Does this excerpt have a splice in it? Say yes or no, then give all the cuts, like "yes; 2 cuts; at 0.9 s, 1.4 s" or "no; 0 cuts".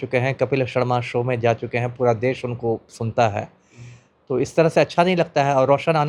no; 0 cuts